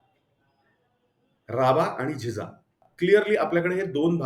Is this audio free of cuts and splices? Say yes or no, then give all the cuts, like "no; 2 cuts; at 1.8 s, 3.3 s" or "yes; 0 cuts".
no; 1 cut; at 2.8 s